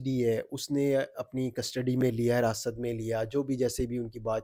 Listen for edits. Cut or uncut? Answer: uncut